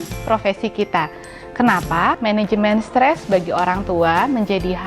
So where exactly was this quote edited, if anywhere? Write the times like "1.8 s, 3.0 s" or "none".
2.2 s

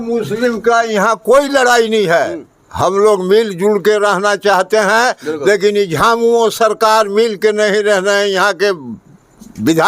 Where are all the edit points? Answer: none

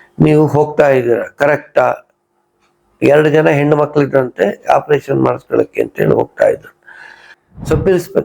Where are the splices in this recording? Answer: 7.3 s

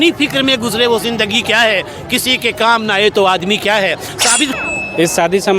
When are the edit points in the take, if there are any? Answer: 4.6 s

